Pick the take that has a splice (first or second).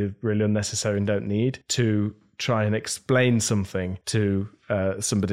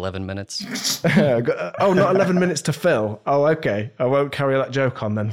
first